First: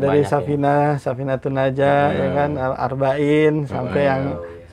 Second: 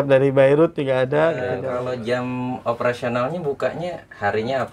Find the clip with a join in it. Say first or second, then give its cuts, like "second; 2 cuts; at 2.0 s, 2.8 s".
second; 1 cut; at 1.6 s